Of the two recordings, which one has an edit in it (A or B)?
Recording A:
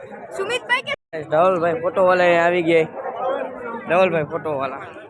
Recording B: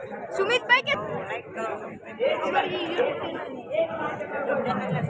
B